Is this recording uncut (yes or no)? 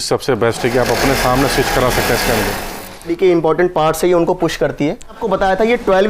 no